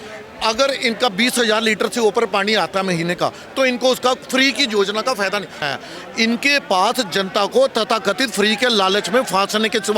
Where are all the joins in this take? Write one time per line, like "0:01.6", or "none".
0:05.6